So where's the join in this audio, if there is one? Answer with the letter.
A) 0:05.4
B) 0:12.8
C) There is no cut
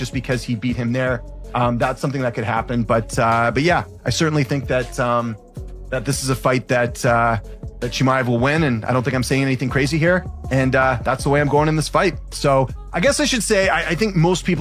B